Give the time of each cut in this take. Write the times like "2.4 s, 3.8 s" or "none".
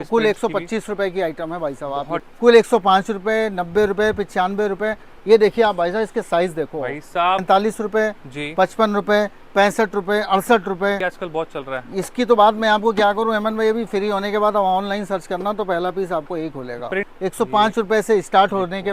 2.3 s, 7.4 s, 11.1 s, 17.1 s